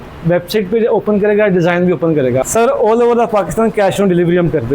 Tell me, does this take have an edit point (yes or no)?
yes